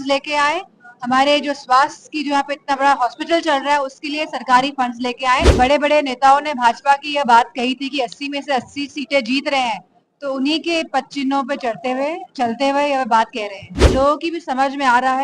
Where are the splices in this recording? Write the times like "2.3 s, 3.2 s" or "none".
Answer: 5.5 s, 13.7 s